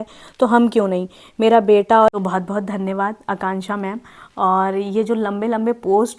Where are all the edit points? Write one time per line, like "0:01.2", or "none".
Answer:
0:02.1